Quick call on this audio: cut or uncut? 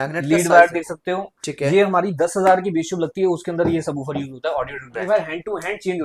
cut